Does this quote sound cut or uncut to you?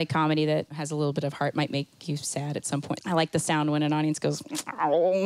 cut